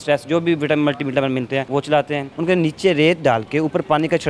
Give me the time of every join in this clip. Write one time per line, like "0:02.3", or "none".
0:01.7
0:02.3